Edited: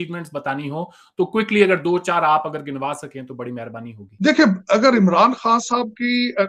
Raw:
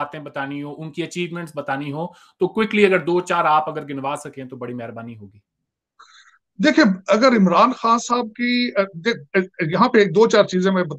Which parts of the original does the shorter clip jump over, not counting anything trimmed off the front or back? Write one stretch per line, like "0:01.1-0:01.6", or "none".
0:05.2-0:06.4